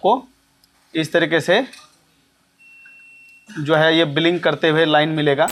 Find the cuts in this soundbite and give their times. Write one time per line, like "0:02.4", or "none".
none